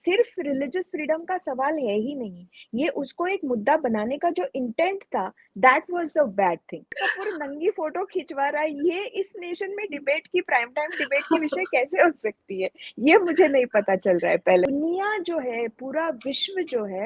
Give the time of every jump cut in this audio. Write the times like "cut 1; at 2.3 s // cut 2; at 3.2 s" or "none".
cut 1; at 7.0 s // cut 2; at 14.6 s